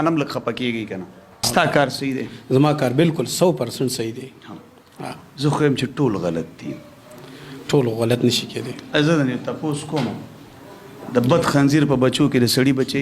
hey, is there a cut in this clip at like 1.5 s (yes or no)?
yes